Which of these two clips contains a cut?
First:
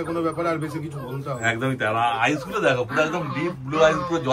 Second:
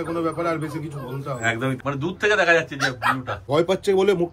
second; 2 cuts; at 1.8 s, 3.5 s

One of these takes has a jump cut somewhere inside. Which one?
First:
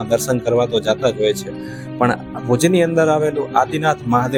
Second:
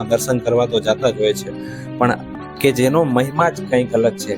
second; 1 cut; at 2.3 s

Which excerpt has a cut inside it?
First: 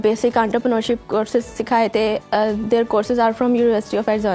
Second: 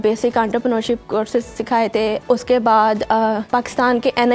second; 2 cuts; at 2.2 s, 3.4 s

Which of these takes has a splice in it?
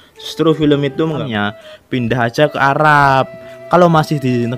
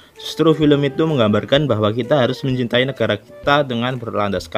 first; 1 cut; at 1.2 s

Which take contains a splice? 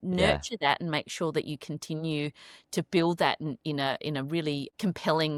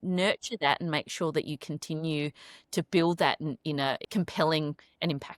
second; 1 cut; at 4.0 s

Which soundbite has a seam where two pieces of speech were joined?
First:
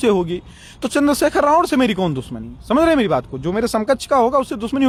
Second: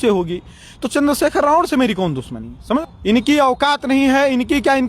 second; 1 cut; at 2.8 s

